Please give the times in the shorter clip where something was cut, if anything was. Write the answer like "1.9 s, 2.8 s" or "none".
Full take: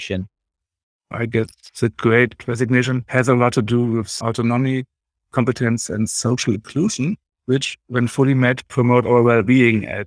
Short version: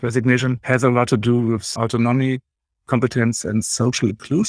none